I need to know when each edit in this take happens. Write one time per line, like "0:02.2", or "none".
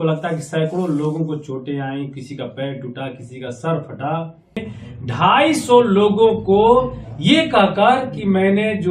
0:04.7

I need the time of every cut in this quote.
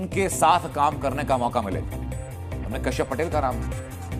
none

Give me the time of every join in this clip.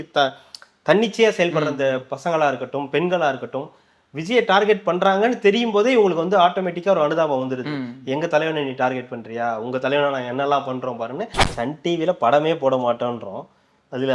0:11.4

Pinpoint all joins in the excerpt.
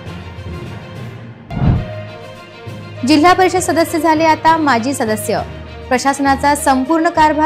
0:00.9

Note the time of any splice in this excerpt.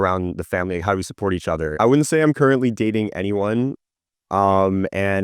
0:01.8

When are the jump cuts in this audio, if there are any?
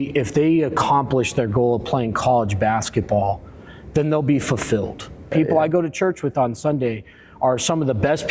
0:05.3

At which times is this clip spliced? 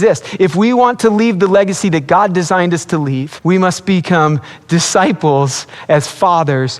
0:03.3

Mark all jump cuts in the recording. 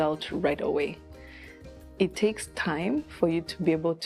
none

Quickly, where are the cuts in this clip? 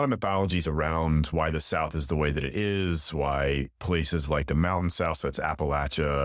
0:01.3

